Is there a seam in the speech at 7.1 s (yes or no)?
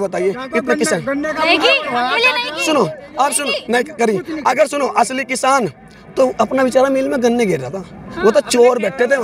no